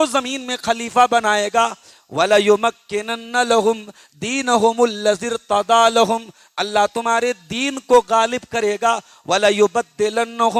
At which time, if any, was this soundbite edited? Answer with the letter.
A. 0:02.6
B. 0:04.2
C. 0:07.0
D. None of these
D